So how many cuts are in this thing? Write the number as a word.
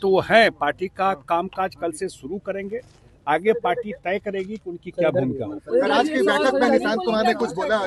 zero